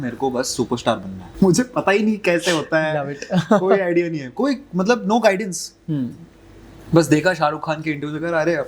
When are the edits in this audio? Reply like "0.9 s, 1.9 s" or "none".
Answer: 1.2 s